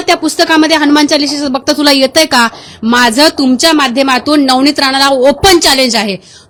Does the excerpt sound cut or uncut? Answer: uncut